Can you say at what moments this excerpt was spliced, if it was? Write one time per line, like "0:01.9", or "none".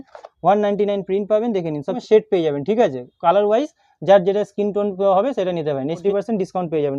0:02.0
0:06.0